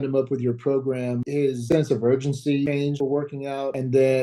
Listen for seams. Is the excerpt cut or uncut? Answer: cut